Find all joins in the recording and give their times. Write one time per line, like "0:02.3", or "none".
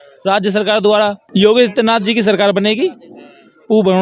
0:01.2

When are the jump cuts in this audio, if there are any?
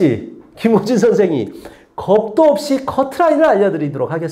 none

